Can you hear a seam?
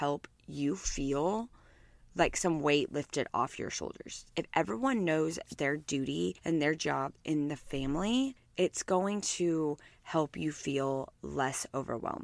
no; 0 cuts

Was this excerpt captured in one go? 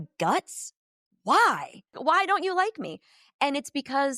no; 1 cut; at 2.0 s

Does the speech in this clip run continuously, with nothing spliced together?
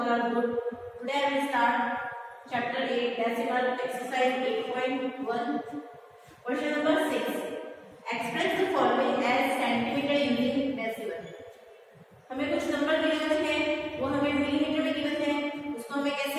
yes; 0 cuts

